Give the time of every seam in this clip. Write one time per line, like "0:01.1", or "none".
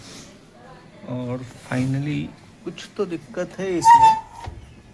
0:02.4